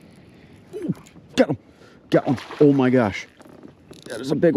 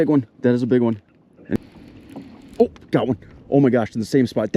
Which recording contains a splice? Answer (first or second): second